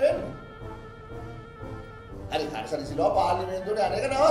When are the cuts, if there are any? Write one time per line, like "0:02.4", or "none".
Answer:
none